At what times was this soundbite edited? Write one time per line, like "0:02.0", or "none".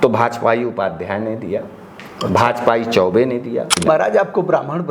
0:03.8